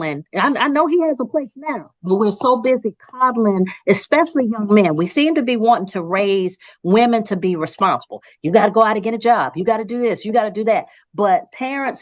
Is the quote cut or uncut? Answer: uncut